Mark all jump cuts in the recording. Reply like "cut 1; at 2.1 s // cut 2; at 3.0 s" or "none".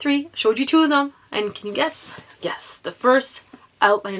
none